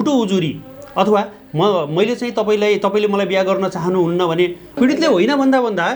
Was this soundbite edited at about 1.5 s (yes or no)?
no